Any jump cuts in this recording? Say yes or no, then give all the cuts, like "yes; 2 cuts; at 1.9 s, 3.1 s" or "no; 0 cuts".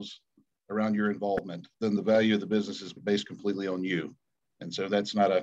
yes; 2 cuts; at 1.9 s, 3.0 s